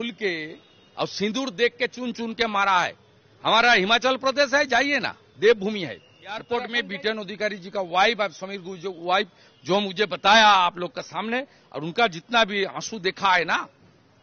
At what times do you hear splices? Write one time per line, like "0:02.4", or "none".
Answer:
0:06.5